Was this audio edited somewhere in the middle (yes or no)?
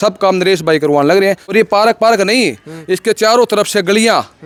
no